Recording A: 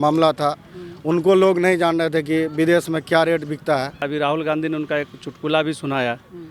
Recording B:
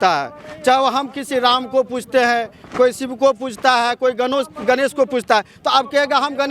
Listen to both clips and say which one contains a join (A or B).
A